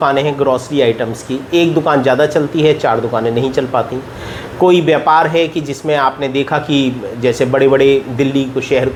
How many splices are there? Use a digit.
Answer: 0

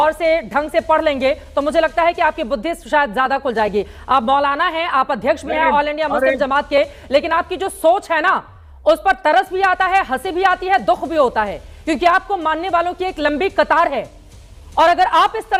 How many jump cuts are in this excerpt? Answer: 0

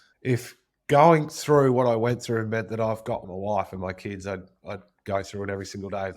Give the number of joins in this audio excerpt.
1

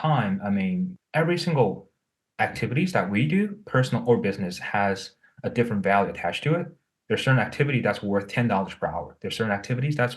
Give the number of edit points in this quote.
1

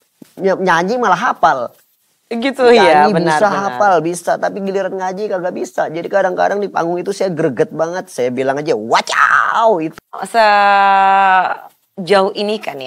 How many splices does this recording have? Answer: 1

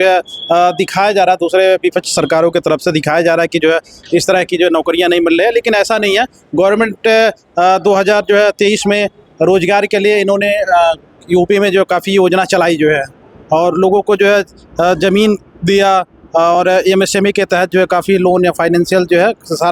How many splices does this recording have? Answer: 0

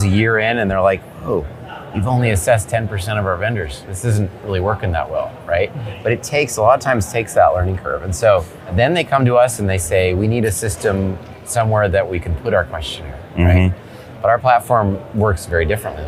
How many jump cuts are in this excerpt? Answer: 0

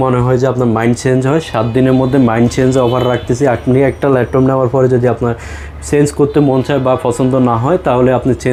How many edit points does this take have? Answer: 0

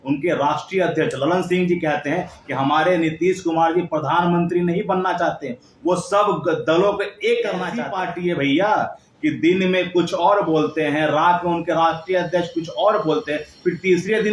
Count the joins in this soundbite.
1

